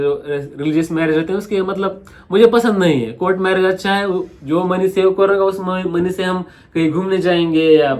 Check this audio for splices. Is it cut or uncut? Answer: uncut